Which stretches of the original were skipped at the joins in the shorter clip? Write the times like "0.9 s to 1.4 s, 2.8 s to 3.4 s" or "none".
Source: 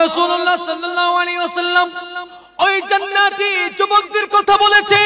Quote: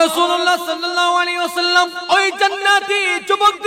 2.0 s to 2.5 s